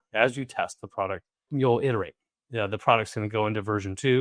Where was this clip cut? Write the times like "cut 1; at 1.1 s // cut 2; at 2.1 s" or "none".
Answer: cut 1; at 1.5 s